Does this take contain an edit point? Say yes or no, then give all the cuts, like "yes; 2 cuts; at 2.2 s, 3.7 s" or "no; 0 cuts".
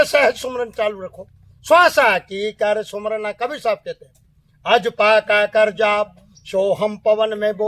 no; 0 cuts